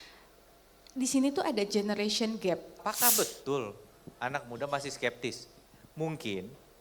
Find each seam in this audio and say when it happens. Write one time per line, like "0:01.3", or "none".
0:02.8